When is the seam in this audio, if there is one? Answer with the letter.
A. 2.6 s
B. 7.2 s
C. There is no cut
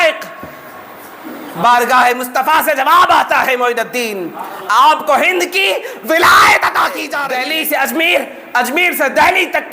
B